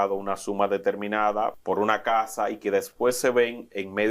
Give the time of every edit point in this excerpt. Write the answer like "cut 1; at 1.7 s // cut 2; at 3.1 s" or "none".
cut 1; at 1.6 s